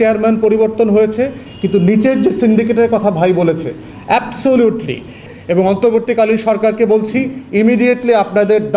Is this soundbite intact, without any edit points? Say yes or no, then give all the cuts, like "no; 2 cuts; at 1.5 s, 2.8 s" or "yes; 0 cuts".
no; 1 cut; at 5.3 s